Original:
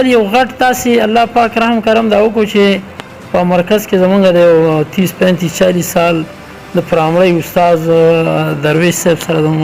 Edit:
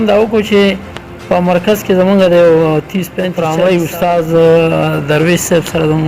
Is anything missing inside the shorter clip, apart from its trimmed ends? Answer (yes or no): yes